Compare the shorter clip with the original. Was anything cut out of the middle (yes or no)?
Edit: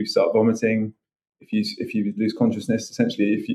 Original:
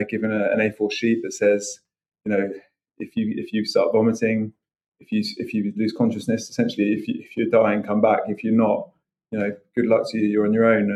no